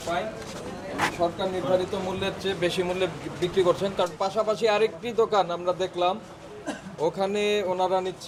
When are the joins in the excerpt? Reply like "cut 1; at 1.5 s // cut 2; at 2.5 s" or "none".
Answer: none